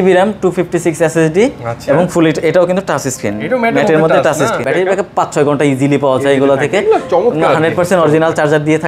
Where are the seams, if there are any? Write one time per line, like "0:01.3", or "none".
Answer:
0:04.6

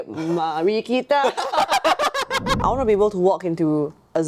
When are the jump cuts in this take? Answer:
0:02.6

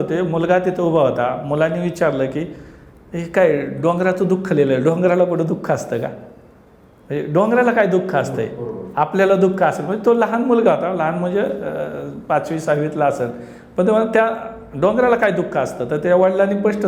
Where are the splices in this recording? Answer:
none

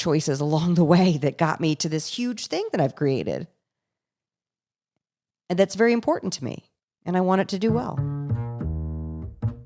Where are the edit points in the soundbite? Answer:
0:08.0

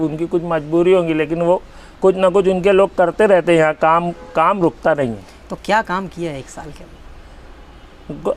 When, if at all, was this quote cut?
none

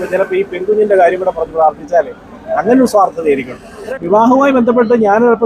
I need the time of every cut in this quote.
0:03.9

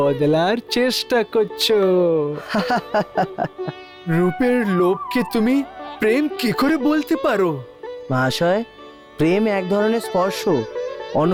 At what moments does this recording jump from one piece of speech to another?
none

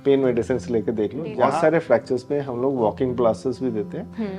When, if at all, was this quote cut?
0:01.3

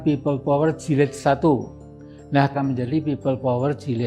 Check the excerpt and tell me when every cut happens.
0:02.5

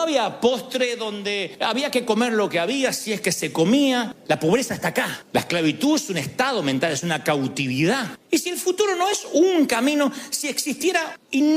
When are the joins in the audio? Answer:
0:04.1
0:05.2
0:08.2

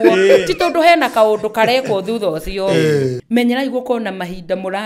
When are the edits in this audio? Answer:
0:03.2

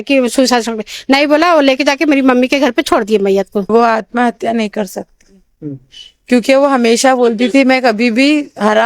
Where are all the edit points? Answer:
0:03.7

